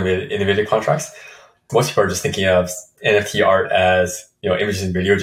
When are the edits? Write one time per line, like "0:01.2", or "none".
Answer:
0:01.7